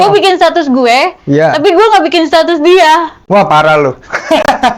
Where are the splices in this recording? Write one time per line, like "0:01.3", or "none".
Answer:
none

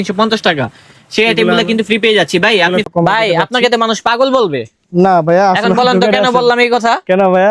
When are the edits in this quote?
0:02.9

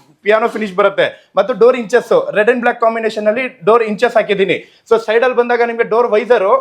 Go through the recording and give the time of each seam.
none

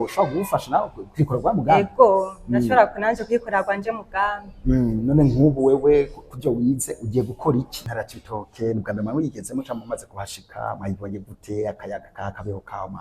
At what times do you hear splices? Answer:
0:07.8

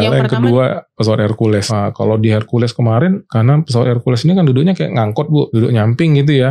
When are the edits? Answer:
0:01.7
0:03.3
0:05.5

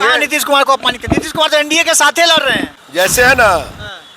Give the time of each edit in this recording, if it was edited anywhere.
0:02.8

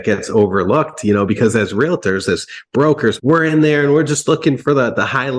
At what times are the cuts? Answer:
none

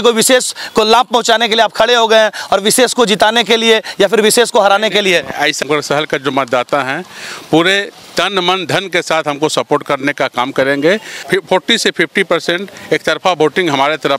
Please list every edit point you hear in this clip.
0:05.6
0:11.1

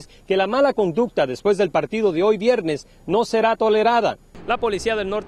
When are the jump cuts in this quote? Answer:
0:04.3

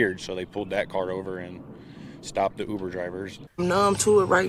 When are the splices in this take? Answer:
0:03.4

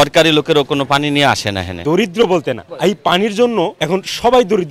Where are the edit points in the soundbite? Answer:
0:01.7
0:02.7
0:03.8

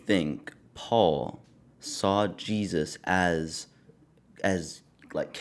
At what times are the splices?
none

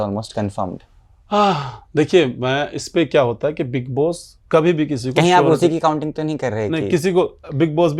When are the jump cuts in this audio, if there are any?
none

